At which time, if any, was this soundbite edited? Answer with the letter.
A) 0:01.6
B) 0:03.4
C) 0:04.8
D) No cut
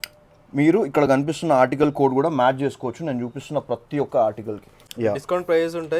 C